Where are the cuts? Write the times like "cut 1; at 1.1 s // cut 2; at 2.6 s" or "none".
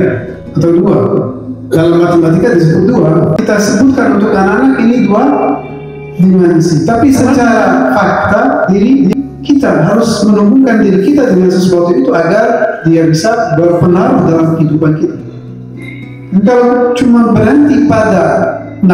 cut 1; at 3.4 s // cut 2; at 8.6 s

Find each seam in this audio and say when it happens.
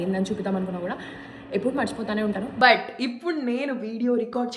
cut 1; at 2.5 s

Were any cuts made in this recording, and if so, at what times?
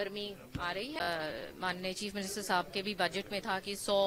cut 1; at 1.1 s

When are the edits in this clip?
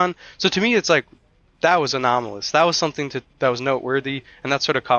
none

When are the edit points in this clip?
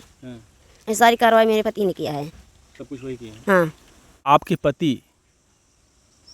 cut 1; at 4.2 s

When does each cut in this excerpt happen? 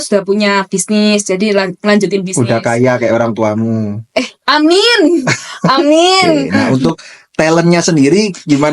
cut 1; at 6.6 s

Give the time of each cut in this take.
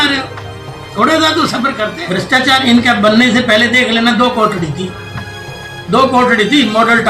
cut 1; at 2.0 s

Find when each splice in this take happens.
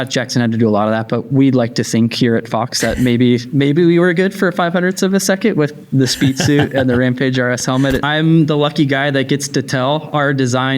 cut 1; at 8.0 s

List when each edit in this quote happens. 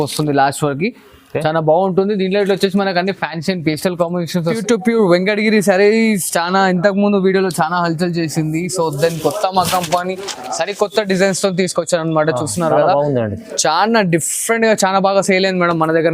cut 1; at 4.4 s

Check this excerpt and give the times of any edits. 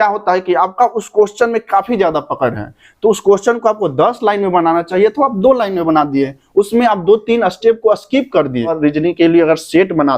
cut 1; at 8.8 s

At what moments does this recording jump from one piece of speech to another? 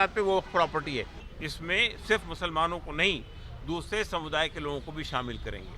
cut 1; at 1.3 s

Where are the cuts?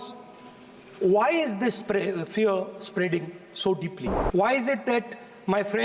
cut 1; at 4.1 s

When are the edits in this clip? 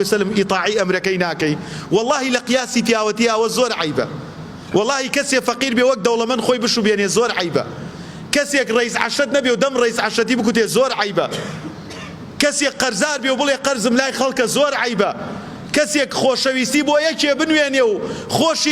none

